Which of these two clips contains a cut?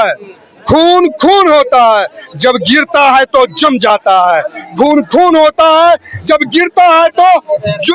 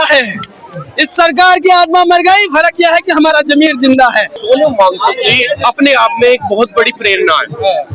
second; 1 cut; at 4.4 s

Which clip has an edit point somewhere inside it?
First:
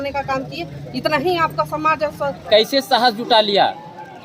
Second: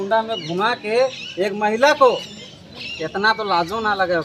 first; 1 cut; at 2.4 s

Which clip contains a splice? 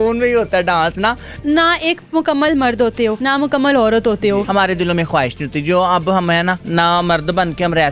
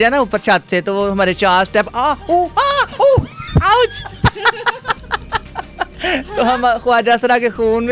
first; 4 cuts; at 1.3 s, 3.2 s, 4.5 s, 6.6 s

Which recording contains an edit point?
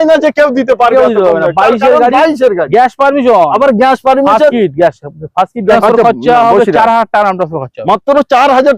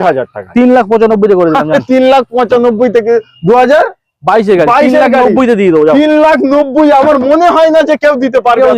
first; 1 cut; at 5.8 s

